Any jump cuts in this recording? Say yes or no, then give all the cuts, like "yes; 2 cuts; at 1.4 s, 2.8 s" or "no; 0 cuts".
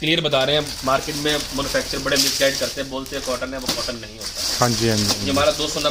no; 0 cuts